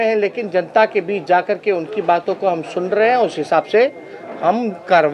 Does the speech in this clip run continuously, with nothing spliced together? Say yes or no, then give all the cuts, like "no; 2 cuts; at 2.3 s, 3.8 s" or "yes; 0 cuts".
yes; 0 cuts